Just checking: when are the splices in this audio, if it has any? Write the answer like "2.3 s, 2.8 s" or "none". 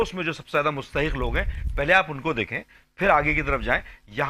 none